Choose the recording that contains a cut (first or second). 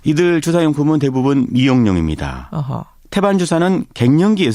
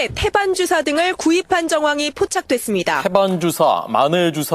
second